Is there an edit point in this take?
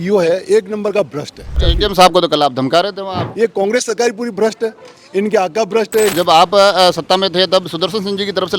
yes; 3 cuts; at 1.7 s, 3.3 s, 6.1 s

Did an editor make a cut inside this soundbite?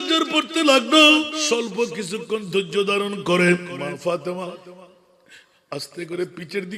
yes; 2 cuts; at 1.4 s, 3.7 s

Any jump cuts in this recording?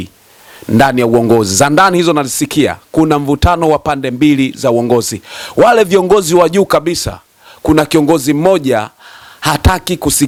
no; 0 cuts

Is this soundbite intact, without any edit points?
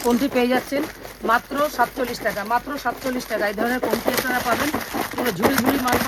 yes; 0 cuts

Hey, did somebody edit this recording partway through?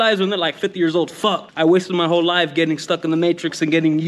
no; 0 cuts

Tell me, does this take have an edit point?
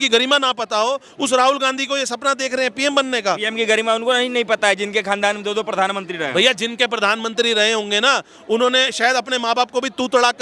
no; 0 cuts

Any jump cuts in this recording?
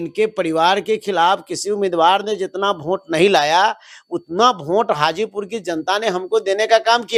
no; 0 cuts

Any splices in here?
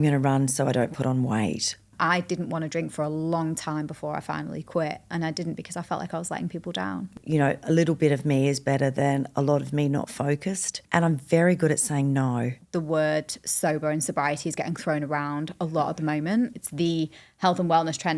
yes; 5 cuts; at 1.8 s, 7.2 s, 10.8 s, 12.6 s, 16.6 s

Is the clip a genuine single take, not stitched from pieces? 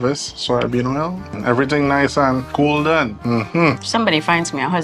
no; 3 cuts; at 1.3 s, 2.5 s, 3.7 s

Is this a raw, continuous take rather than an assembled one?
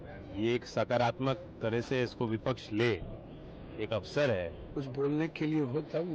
no; 1 cut; at 4.7 s

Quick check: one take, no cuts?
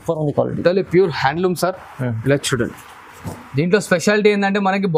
yes; 0 cuts

